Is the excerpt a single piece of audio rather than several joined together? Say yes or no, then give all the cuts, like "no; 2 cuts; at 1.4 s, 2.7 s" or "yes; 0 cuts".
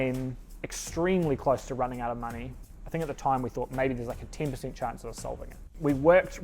no; 2 cuts; at 2.5 s, 5.7 s